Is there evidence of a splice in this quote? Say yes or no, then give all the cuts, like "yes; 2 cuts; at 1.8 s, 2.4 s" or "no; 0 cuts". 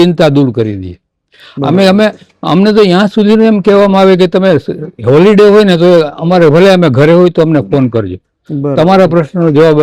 no; 0 cuts